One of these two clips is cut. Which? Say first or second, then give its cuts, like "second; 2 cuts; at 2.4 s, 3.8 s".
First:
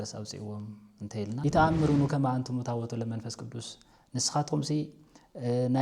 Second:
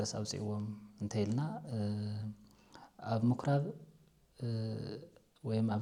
first; 1 cut; at 1.3 s